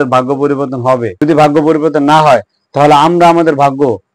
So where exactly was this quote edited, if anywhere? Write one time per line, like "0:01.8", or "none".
0:01.1